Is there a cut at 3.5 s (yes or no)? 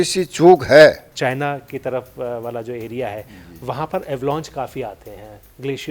no